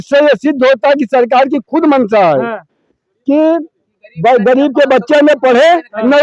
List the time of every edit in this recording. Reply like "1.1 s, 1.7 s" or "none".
none